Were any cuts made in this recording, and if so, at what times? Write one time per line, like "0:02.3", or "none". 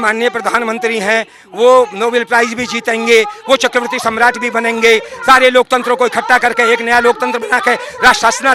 none